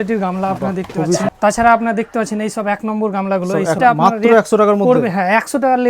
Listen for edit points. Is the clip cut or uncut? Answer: cut